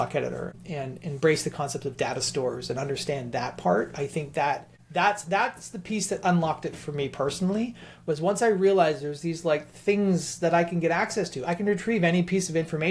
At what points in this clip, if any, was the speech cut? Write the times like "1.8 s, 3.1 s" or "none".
4.7 s